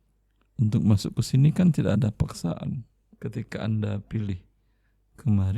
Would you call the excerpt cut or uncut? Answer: cut